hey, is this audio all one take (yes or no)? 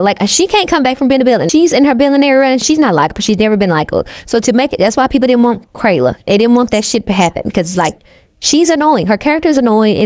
no